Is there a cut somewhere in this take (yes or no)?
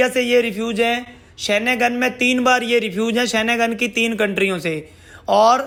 no